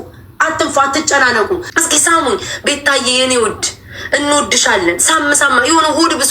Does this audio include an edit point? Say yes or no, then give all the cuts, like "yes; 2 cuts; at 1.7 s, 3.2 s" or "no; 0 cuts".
yes; 1 cut; at 1.7 s